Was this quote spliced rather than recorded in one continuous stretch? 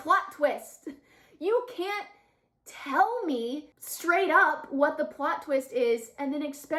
no; 0 cuts

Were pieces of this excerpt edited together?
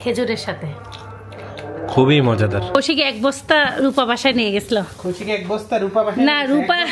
yes; 1 cut; at 2.7 s

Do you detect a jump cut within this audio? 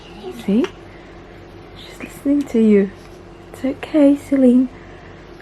no; 0 cuts

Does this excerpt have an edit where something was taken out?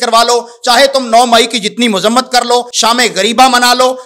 yes; 1 cut; at 2.7 s

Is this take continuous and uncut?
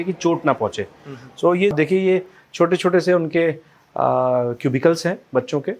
no; 1 cut; at 1.7 s

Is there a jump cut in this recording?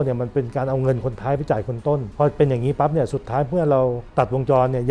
yes; 2 cuts; at 2.1 s, 4.0 s

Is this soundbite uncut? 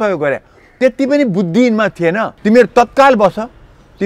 no; 1 cut; at 2.3 s

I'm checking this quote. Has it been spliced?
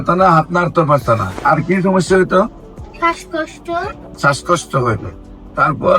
yes; 2 cuts; at 1.4 s, 4.0 s

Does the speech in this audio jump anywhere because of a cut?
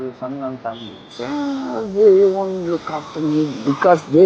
no; 0 cuts

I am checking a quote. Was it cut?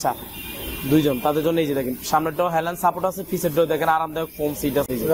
no; 0 cuts

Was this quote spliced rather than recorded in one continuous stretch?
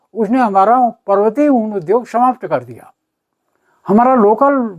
no; 0 cuts

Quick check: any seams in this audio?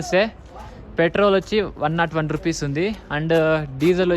no; 0 cuts

